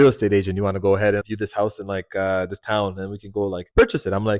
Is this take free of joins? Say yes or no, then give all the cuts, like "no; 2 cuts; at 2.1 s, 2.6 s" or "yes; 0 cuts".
no; 1 cut; at 1.2 s